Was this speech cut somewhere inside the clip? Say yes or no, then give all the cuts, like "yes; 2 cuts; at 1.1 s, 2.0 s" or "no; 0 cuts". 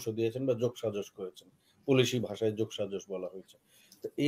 no; 0 cuts